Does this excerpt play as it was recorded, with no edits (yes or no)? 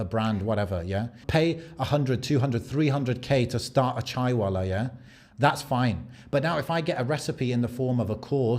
no